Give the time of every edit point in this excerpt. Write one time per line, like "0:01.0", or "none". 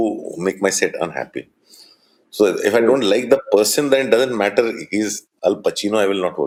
none